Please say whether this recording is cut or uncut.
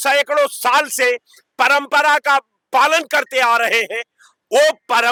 uncut